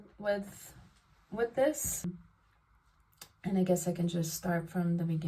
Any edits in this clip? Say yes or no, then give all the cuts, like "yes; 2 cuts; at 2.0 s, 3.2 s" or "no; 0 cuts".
yes; 1 cut; at 2.2 s